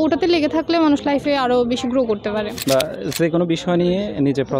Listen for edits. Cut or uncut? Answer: cut